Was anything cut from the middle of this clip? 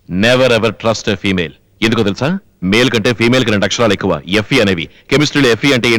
no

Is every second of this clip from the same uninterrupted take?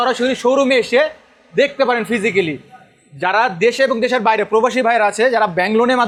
yes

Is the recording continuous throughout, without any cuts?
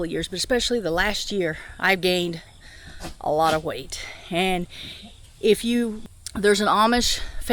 no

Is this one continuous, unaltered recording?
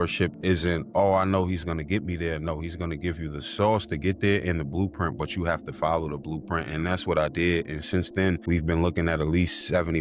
yes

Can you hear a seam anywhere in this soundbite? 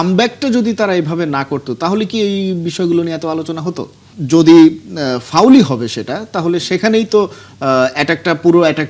yes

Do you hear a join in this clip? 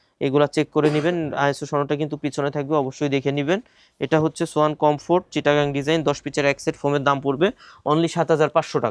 no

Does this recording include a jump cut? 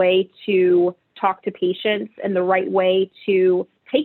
no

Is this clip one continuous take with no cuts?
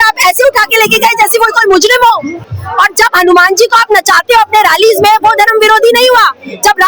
no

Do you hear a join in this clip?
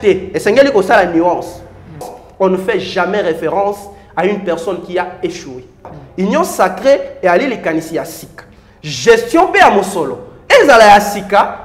yes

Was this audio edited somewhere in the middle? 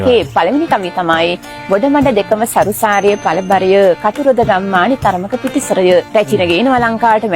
yes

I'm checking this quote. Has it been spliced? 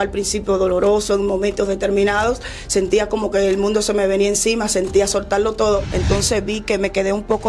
yes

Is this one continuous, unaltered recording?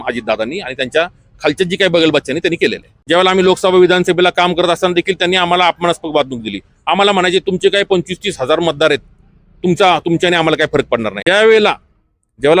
no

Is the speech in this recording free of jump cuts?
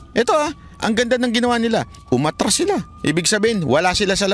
no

